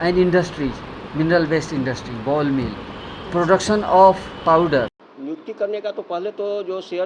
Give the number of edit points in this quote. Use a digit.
1